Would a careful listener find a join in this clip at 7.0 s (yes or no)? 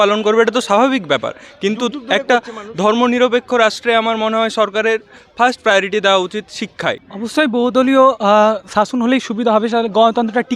yes